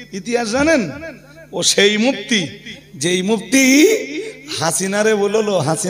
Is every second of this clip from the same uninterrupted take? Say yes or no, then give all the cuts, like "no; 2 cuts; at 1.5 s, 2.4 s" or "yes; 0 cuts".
yes; 0 cuts